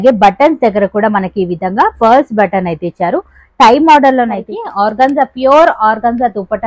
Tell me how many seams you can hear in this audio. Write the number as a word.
one